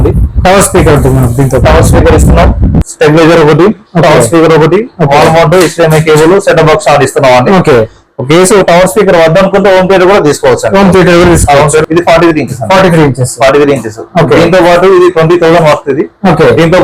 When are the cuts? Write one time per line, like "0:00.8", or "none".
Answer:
0:11.9